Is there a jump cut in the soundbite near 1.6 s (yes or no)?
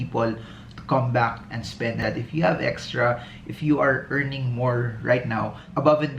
yes